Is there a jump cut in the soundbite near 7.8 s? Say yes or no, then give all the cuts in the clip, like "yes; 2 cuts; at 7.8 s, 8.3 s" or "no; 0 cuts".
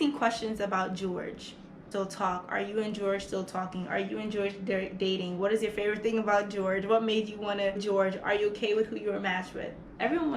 yes; 2 cuts; at 1.9 s, 7.8 s